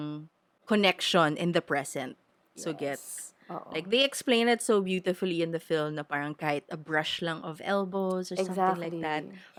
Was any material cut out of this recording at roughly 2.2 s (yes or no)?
no